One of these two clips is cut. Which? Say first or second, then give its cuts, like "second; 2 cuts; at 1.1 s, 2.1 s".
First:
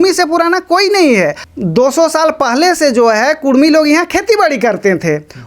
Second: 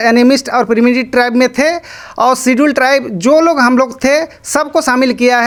first; 1 cut; at 1.5 s